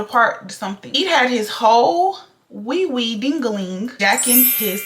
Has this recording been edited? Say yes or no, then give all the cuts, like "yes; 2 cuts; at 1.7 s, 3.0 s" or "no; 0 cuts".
yes; 2 cuts; at 0.9 s, 3.9 s